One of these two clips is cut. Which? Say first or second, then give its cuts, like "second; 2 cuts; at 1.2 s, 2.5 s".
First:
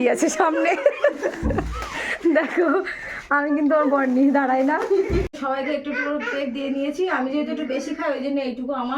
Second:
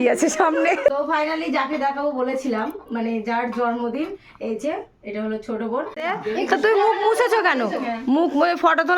second; 2 cuts; at 0.9 s, 6.0 s